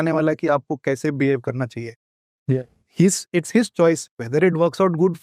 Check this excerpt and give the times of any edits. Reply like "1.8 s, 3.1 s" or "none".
none